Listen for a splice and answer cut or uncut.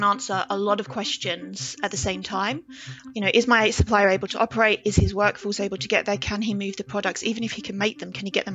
cut